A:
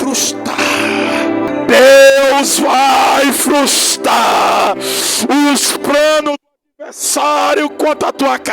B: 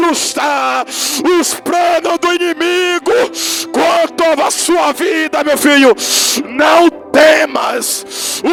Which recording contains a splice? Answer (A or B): A